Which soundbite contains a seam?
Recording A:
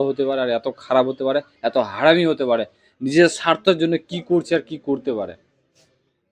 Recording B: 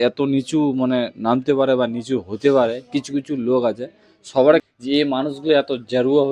B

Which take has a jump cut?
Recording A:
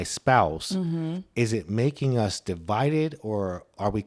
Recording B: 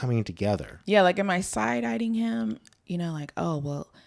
B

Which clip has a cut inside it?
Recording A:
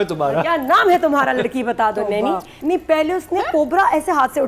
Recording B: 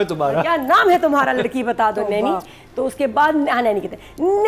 A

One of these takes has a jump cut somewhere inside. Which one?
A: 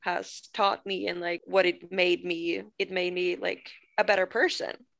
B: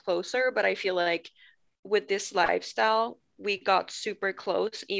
A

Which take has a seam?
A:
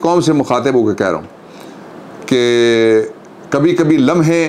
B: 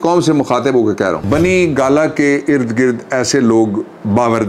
B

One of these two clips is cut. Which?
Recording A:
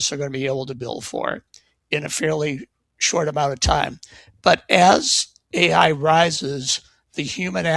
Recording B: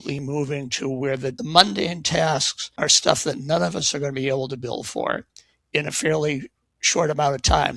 B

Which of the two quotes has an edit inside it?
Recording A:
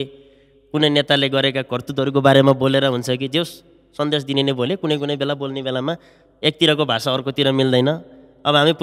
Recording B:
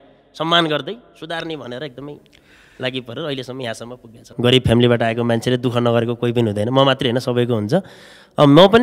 B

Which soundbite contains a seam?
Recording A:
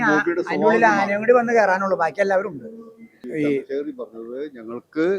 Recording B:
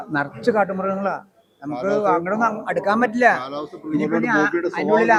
A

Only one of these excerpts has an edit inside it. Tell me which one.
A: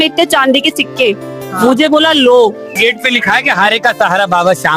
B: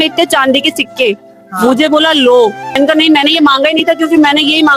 A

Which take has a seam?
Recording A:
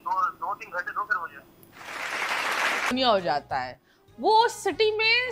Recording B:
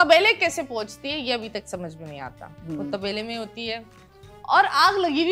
A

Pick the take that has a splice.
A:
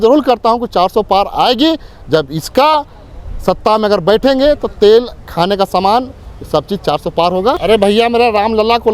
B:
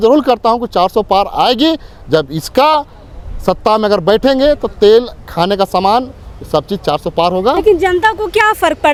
A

